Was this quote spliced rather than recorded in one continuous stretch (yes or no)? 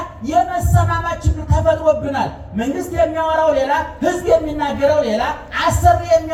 no